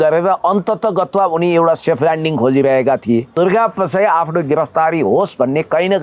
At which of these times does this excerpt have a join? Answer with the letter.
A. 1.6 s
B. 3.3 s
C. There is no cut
B